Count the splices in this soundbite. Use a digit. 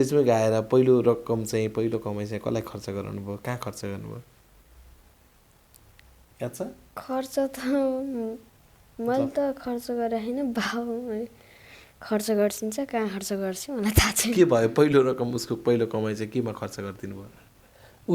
0